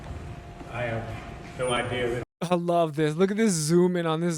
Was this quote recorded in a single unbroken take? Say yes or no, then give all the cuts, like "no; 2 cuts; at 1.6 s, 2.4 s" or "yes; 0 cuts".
no; 1 cut; at 2.2 s